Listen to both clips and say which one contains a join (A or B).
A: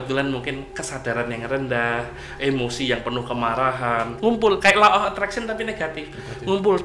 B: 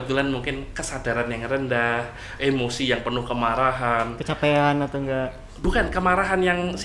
A